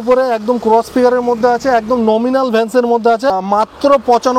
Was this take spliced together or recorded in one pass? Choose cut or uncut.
cut